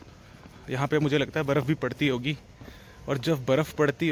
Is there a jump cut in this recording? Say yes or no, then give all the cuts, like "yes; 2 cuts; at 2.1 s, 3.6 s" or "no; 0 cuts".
no; 0 cuts